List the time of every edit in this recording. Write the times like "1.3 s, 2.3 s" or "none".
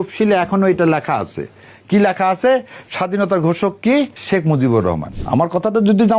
4.2 s, 5.2 s